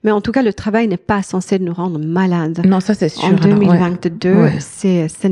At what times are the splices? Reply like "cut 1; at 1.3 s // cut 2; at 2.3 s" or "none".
none